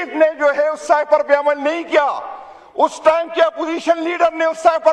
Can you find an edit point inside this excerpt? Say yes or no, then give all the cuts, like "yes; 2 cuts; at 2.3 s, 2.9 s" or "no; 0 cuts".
no; 0 cuts